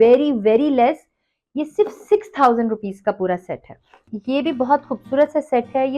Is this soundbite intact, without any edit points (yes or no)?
no